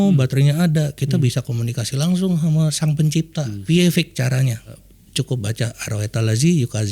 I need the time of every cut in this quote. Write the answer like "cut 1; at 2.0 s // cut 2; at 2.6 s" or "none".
cut 1; at 3.5 s // cut 2; at 4.8 s